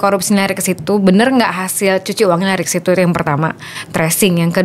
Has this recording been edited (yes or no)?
no